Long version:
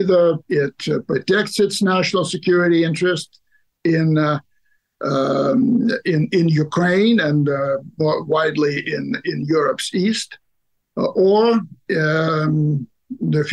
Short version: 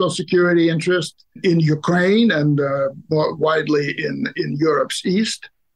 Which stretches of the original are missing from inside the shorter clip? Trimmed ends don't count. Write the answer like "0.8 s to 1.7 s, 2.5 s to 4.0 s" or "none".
3.5 s to 6.3 s